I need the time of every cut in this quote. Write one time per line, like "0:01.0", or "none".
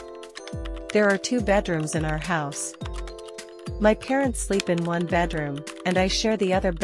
0:02.5
0:03.8